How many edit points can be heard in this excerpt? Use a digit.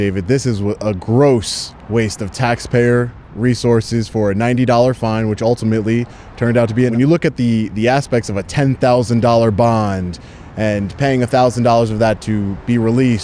1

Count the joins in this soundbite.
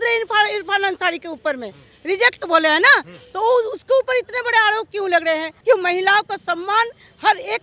1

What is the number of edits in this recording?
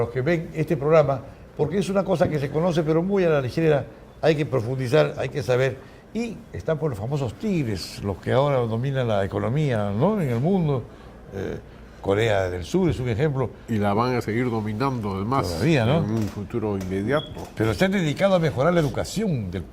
1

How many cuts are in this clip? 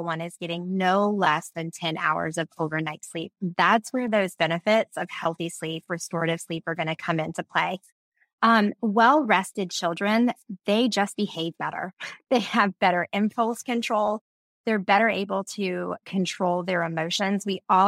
0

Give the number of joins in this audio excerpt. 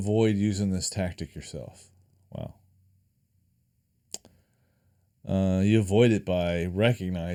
0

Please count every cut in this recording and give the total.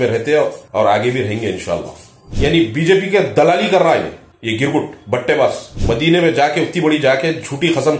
2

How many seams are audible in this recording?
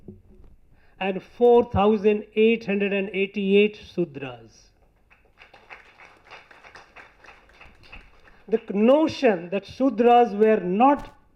0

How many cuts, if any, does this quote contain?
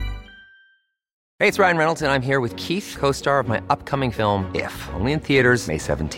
1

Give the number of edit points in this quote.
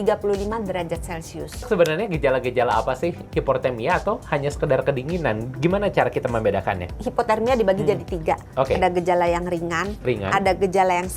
3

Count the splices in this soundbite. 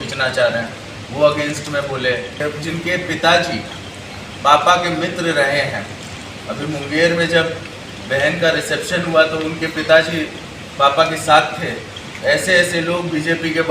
1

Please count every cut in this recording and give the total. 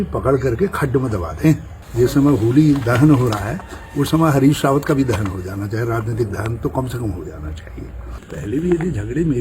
2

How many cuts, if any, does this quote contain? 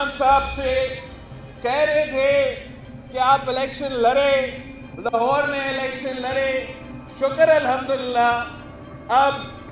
0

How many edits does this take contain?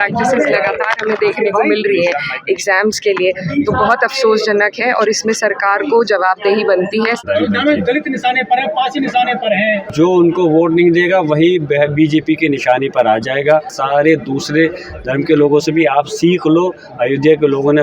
3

